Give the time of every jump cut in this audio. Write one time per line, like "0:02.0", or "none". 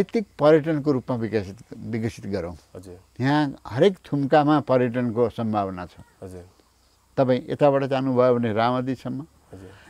none

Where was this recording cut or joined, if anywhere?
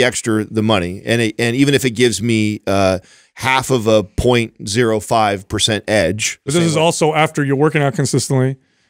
0:06.5

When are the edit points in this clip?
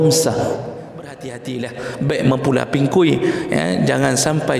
0:01.4

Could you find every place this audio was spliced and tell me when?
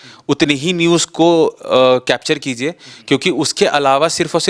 none

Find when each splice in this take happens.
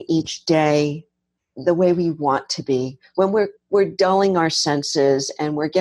0:01.5

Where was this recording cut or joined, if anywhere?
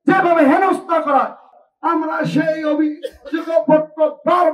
0:01.5

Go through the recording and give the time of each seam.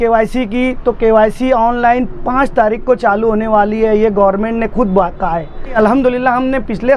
0:05.8

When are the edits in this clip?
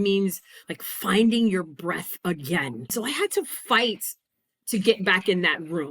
0:02.9

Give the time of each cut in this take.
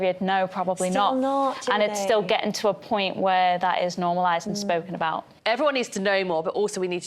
0:05.3

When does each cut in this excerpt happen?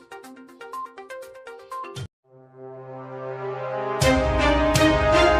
none

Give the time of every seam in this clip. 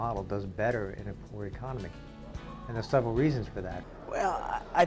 0:03.8

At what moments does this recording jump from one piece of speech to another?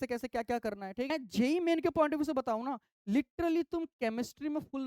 0:01.1

